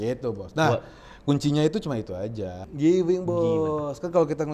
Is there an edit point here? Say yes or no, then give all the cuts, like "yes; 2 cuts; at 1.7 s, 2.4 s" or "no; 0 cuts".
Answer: yes; 1 cut; at 2.6 s